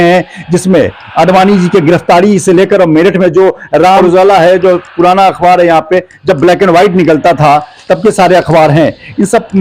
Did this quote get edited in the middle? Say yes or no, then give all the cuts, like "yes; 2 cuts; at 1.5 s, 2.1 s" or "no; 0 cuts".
yes; 1 cut; at 4.0 s